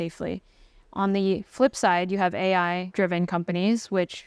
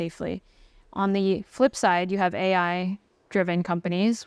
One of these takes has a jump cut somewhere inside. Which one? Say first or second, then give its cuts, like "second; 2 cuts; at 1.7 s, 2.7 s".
first; 1 cut; at 2.8 s